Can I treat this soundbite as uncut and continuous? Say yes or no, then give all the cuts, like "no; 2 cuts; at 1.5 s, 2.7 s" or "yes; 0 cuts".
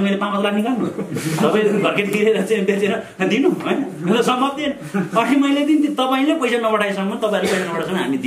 yes; 0 cuts